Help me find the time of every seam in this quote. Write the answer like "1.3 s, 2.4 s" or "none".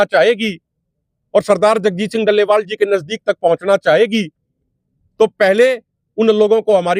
none